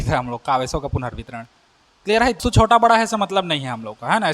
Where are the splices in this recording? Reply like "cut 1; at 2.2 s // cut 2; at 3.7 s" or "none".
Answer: cut 1; at 2.4 s